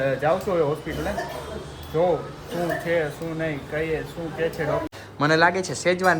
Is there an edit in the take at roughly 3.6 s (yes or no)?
no